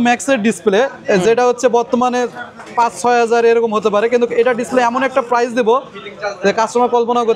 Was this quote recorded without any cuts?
yes; 0 cuts

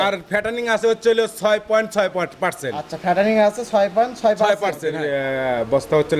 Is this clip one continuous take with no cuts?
no; 1 cut; at 5.0 s

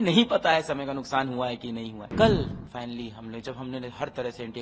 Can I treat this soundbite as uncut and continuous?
no; 1 cut; at 2.0 s

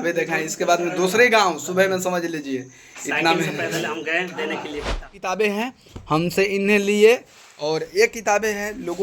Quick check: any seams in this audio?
yes; 1 cut; at 5.2 s

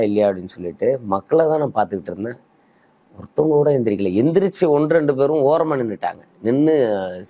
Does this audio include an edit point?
no; 0 cuts

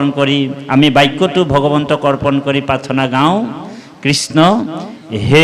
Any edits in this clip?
no; 0 cuts

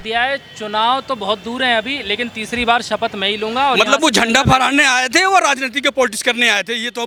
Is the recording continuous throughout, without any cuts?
yes; 0 cuts

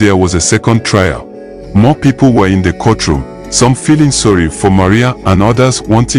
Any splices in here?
yes; 1 cut; at 1.5 s

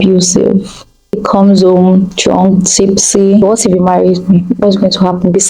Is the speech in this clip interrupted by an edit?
yes; 2 cuts; at 1.2 s, 3.4 s

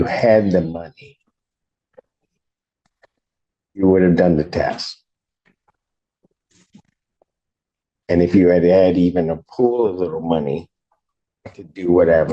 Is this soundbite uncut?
yes; 0 cuts

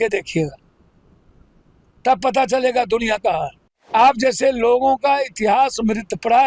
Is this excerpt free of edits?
no; 1 cut; at 3.9 s

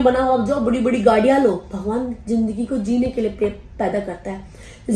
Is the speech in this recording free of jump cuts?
yes; 0 cuts

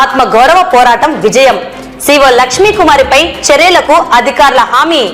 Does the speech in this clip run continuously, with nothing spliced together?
yes; 0 cuts

